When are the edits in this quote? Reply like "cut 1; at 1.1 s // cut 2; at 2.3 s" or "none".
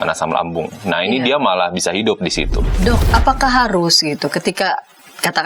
cut 1; at 2.7 s